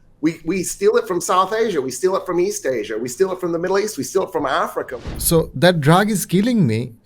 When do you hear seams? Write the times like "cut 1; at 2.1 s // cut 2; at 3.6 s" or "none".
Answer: cut 1; at 4.9 s